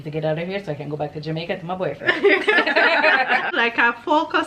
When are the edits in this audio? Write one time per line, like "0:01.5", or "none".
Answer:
0:03.5